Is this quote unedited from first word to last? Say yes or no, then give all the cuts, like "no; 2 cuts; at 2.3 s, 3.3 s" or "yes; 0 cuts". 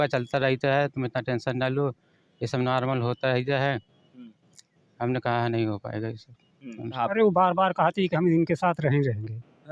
no; 1 cut; at 7.0 s